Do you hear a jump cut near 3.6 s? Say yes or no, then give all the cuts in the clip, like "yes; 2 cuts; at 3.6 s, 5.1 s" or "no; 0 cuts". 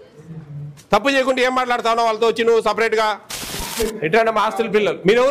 yes; 1 cut; at 3.6 s